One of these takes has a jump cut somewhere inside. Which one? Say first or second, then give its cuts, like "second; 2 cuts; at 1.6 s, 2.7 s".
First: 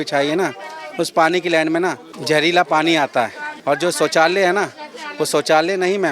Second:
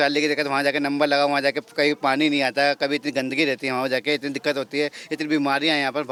first; 2 cuts; at 2.1 s, 3.5 s